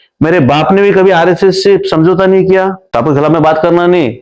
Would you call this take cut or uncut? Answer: cut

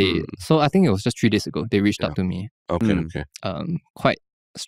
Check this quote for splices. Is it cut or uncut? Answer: uncut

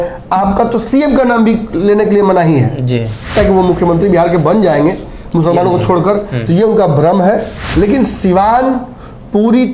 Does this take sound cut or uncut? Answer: cut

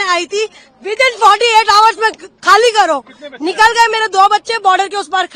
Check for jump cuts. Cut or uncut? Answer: uncut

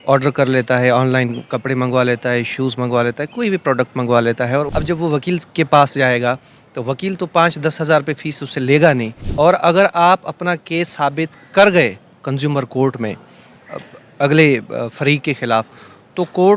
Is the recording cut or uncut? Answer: cut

